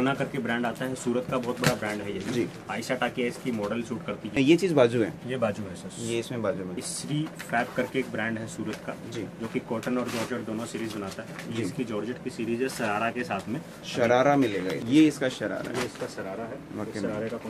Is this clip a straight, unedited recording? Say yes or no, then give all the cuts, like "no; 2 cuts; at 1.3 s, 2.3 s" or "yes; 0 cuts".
no; 3 cuts; at 4.3 s, 6.9 s, 14.8 s